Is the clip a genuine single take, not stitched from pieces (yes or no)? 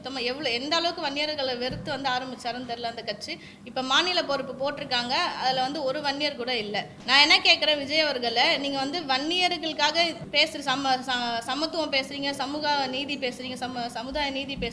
no